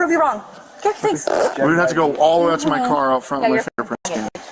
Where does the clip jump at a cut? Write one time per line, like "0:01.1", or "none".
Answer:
none